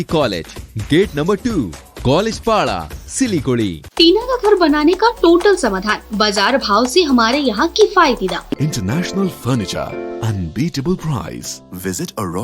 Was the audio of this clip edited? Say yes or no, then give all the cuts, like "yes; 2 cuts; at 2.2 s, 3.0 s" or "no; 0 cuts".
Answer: yes; 2 cuts; at 3.8 s, 8.6 s